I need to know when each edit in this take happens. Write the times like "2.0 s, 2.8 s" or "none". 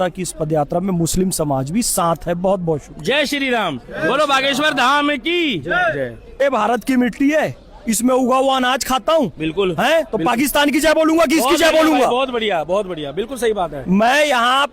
6.4 s